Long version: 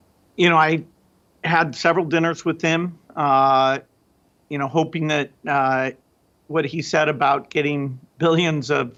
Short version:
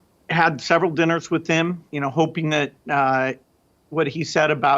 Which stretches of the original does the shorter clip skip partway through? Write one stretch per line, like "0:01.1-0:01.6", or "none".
0:03.0-0:04.4